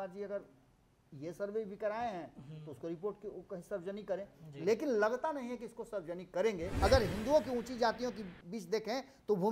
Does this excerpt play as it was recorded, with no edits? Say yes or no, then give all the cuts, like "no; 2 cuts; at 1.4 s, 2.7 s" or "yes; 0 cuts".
no; 1 cut; at 6.7 s